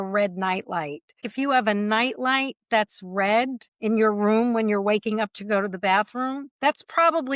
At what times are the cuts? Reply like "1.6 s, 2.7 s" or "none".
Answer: 1.3 s